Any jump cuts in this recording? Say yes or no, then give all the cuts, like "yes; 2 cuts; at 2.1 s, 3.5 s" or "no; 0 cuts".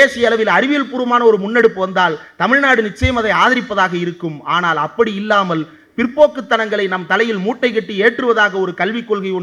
no; 0 cuts